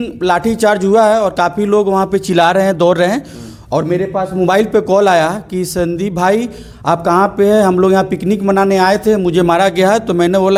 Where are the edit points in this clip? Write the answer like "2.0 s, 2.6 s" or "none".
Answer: none